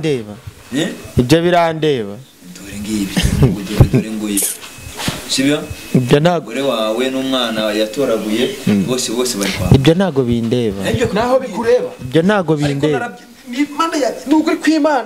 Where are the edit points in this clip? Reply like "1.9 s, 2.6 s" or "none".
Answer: none